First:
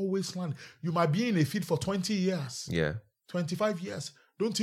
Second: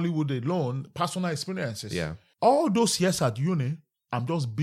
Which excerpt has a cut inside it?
second; 1 cut; at 2.2 s

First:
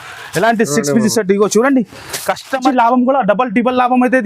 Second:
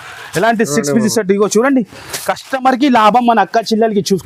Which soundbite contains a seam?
first; 1 cut; at 2.6 s

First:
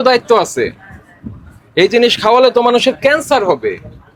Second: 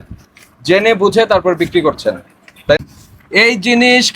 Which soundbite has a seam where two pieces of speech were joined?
second; 1 cut; at 2.8 s

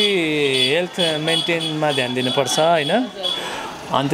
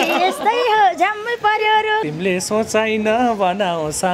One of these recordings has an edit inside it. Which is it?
second; 1 cut; at 2.1 s

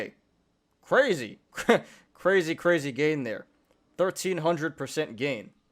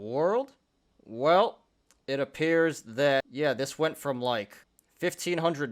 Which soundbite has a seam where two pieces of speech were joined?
second; 1 cut; at 3.3 s

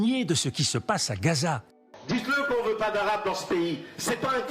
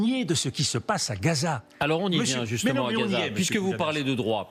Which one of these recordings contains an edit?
first; 1 cut; at 1.7 s

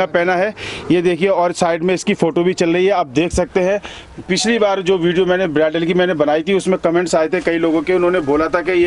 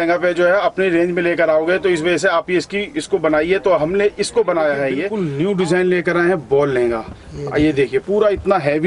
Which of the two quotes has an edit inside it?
second; 1 cut; at 5.1 s

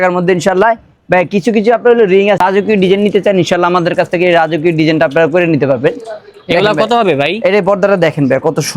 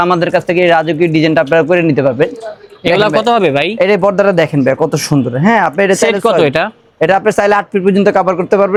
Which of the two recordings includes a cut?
first; 1 cut; at 2.4 s

